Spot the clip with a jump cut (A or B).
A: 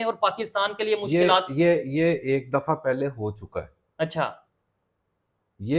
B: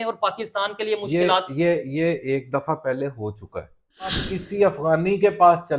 B